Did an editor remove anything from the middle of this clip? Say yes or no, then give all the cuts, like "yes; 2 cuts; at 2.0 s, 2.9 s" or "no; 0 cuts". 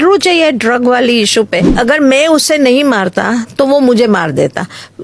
yes; 1 cut; at 1.7 s